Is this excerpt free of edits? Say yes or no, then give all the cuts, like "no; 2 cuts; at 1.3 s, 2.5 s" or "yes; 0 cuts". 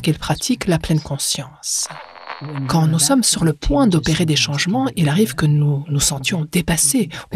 no; 1 cut; at 2.5 s